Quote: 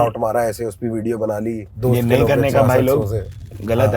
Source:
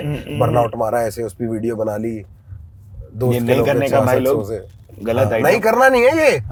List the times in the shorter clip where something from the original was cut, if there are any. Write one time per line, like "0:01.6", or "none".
0:01.7